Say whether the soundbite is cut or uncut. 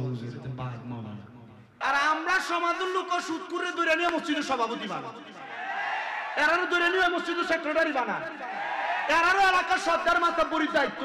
cut